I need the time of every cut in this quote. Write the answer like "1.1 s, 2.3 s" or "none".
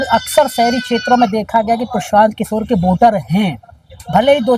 none